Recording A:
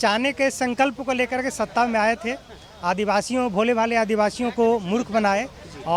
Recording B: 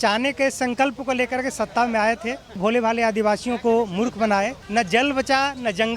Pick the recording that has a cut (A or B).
B